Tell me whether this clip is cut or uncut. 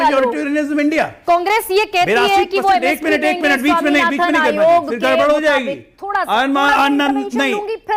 uncut